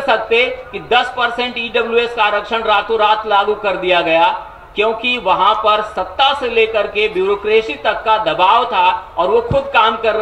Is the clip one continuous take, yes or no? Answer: yes